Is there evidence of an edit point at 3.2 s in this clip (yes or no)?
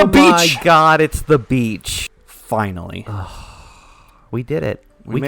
no